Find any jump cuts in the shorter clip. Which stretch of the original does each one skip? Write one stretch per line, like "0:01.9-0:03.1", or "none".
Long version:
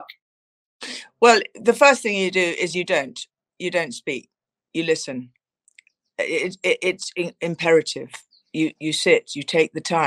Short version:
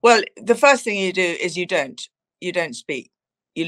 none

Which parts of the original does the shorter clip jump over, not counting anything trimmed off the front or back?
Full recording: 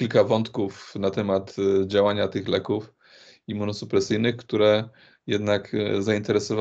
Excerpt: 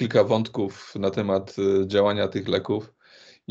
none

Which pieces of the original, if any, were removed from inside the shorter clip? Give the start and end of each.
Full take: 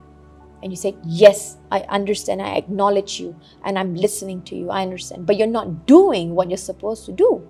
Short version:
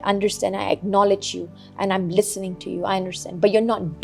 none

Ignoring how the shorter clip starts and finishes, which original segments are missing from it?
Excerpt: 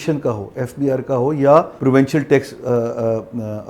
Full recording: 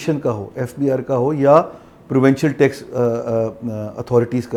0:01.7-0:02.0

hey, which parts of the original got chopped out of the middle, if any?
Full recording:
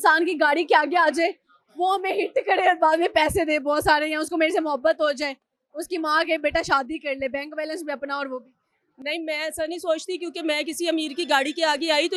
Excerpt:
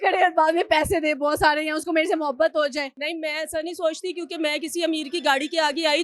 0:05.4-0:09.0

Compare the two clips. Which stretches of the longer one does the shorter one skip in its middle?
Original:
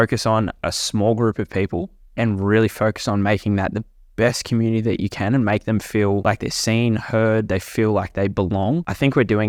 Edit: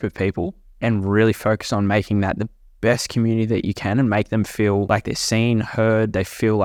none

